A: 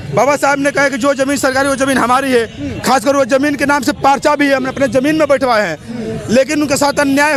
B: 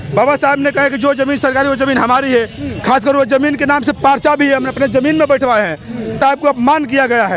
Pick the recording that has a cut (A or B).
B